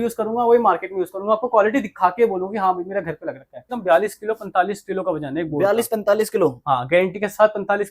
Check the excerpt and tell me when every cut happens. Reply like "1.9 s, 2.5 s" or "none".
3.7 s